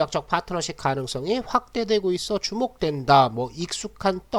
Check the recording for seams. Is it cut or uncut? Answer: uncut